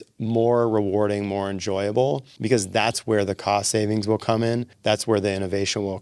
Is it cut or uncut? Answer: cut